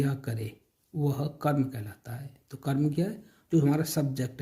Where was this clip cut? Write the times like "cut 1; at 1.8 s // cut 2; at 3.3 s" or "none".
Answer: none